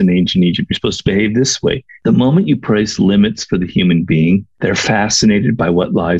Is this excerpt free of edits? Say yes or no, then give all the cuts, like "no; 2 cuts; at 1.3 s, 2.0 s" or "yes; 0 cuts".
no; 1 cut; at 1.9 s